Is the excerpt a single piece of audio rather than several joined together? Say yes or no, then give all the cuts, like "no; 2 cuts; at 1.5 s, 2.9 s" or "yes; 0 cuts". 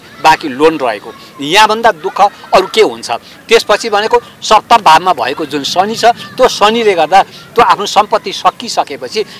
yes; 0 cuts